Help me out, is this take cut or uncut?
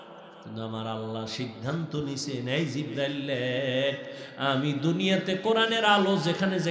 uncut